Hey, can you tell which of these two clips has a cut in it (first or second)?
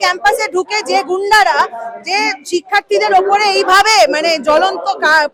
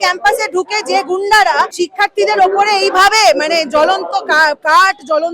second